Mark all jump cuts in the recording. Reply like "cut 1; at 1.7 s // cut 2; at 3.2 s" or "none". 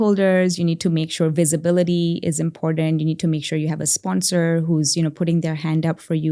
none